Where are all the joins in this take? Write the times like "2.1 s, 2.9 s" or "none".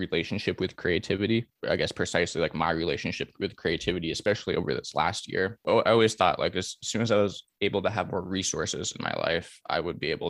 1.5 s, 5.6 s